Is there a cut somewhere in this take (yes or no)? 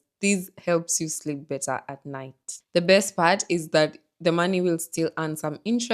no